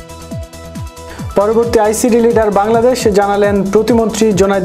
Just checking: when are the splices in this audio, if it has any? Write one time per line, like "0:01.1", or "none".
0:01.3